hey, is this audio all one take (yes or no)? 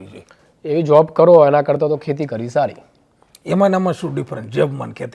yes